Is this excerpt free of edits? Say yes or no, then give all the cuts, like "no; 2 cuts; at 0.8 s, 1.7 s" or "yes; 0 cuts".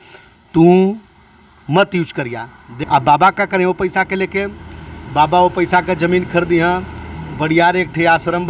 no; 1 cut; at 2.7 s